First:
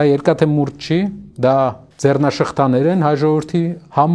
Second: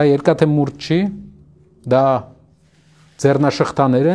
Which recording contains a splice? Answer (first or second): first